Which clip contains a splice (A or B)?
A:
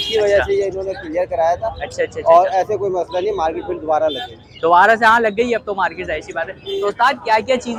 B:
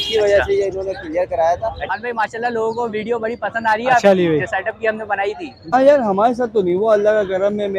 B